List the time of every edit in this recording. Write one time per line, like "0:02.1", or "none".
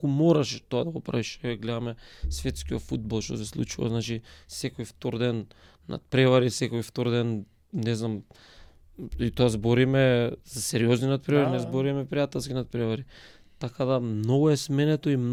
none